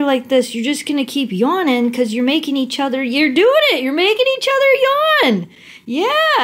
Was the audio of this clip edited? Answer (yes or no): no